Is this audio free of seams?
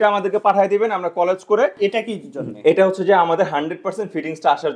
no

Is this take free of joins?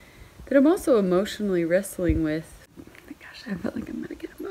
no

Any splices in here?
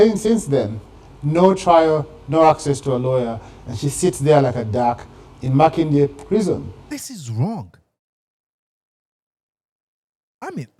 no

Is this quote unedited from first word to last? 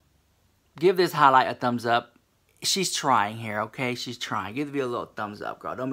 yes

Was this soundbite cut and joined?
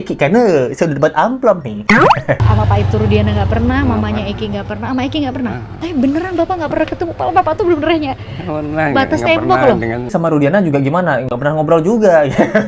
yes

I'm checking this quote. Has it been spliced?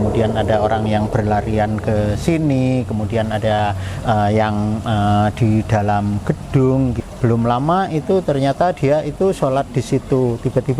yes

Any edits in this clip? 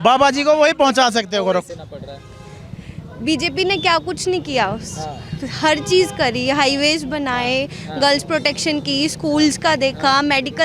yes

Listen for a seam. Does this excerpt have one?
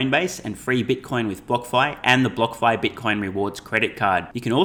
no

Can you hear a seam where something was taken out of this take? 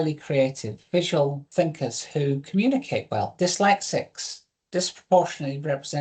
yes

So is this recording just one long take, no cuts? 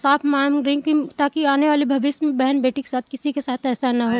yes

